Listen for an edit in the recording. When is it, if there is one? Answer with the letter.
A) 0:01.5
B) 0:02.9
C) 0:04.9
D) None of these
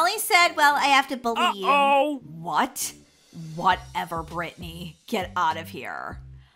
D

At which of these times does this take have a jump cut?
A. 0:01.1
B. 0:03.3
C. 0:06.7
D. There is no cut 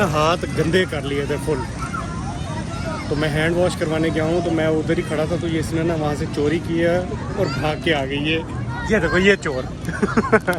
D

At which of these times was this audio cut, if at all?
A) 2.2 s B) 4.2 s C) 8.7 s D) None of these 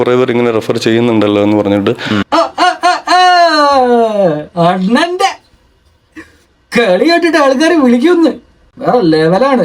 A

